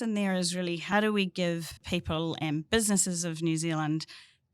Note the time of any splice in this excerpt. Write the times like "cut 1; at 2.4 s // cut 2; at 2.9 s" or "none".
cut 1; at 0.8 s // cut 2; at 1.8 s

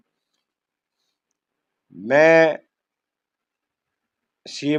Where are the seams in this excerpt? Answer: none

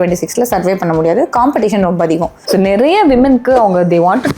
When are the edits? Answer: cut 1; at 2.4 s

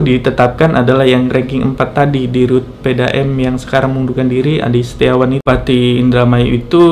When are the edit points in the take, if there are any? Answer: cut 1; at 5.4 s

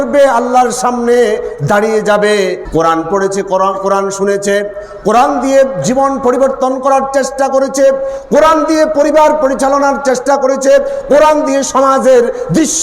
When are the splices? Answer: cut 1; at 2.6 s

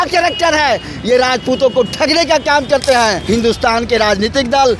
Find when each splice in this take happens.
cut 1; at 3.2 s

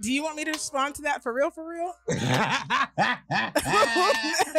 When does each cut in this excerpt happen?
none

